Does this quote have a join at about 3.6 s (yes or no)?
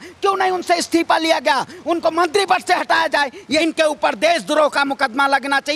yes